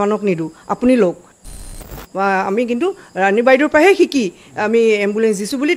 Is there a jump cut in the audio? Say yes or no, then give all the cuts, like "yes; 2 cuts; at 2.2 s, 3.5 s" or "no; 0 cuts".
yes; 1 cut; at 1.5 s